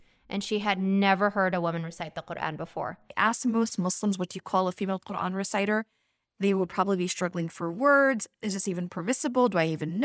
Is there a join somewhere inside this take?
yes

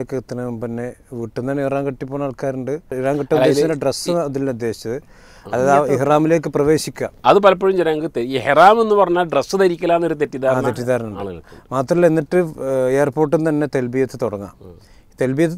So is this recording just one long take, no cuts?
no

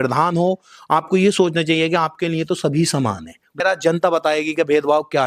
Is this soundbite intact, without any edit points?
no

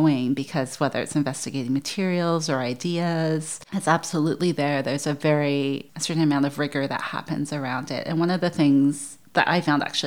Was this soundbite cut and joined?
no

